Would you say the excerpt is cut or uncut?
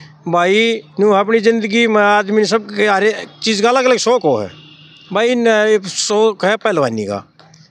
uncut